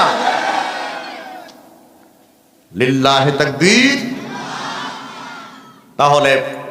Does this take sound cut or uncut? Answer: uncut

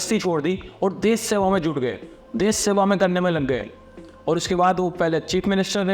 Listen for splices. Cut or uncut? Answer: uncut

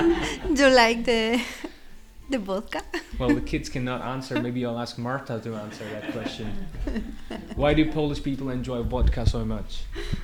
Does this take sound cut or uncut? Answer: uncut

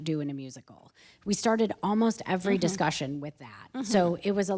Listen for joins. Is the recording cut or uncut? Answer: uncut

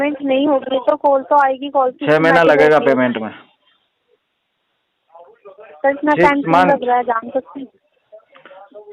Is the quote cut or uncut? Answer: uncut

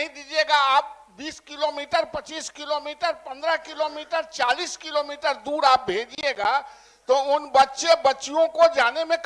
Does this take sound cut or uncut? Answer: uncut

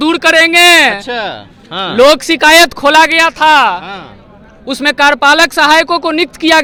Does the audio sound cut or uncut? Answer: uncut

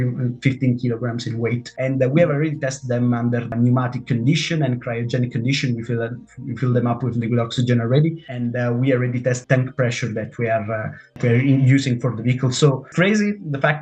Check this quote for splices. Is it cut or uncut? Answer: cut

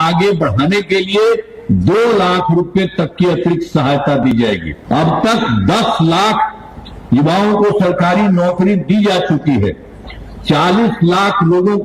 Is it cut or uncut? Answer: cut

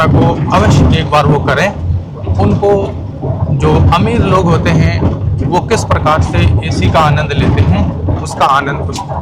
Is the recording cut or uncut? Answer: uncut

